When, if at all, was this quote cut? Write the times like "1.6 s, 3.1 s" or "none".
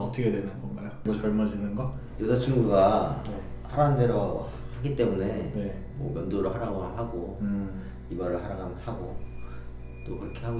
1.0 s